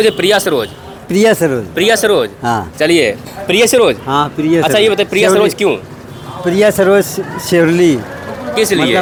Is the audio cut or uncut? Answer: uncut